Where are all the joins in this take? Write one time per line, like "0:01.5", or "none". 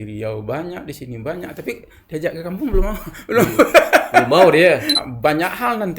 0:05.0